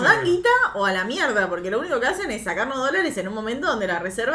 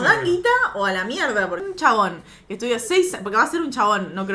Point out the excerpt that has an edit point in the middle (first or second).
second